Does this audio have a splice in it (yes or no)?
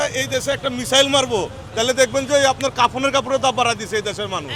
no